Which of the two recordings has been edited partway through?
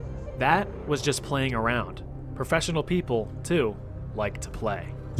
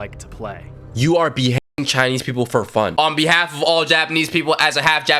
second; 1 cut; at 2.9 s

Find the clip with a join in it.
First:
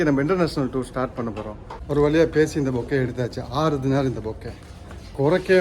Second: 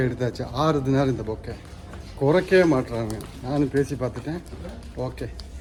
first; 1 cut; at 1.7 s

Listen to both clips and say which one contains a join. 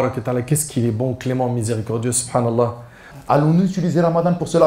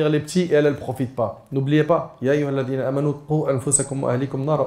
first; 1 cut; at 3.1 s

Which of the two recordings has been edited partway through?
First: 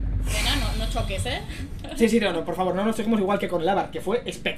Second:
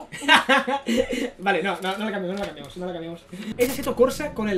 second; 1 cut; at 3.4 s

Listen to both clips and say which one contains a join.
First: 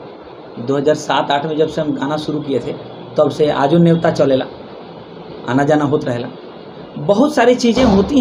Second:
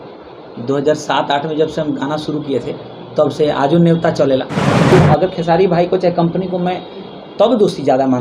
second; 1 cut; at 4.9 s

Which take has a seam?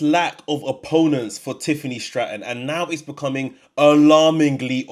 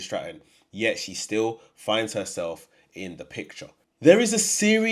second; 1 cut; at 3.8 s

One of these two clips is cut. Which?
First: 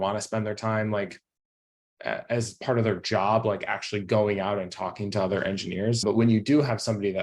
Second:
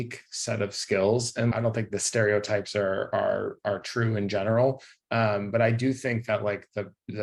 second; 1 cut; at 1.7 s

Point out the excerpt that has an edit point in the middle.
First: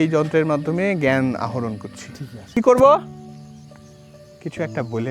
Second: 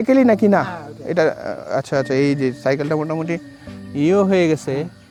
first; 3 cuts; at 2.6 s, 3.0 s, 4.3 s

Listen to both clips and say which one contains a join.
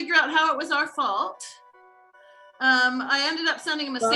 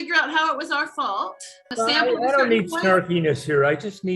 second; 1 cut; at 1.7 s

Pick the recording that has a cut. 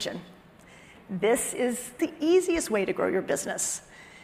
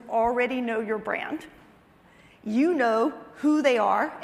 first; 1 cut; at 1.9 s

